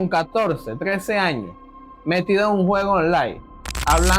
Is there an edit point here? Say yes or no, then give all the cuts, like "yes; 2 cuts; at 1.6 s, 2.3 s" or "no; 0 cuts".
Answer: no; 0 cuts